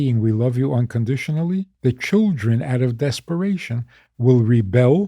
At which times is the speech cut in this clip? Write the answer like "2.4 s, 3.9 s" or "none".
1.7 s